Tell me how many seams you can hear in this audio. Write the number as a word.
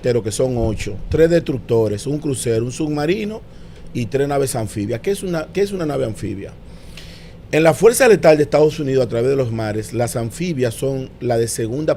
zero